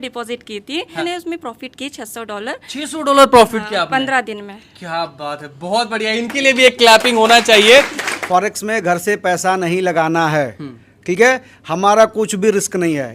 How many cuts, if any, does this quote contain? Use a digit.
2